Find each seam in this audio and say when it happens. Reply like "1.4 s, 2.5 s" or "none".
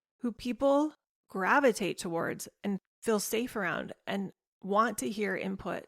2.9 s